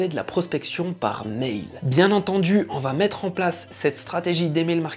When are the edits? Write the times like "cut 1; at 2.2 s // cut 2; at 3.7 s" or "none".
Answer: cut 1; at 1.8 s